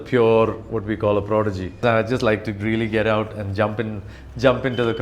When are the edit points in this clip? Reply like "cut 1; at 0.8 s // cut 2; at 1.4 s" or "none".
cut 1; at 1.8 s